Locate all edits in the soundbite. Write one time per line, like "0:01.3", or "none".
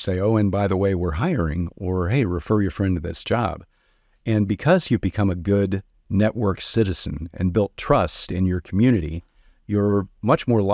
none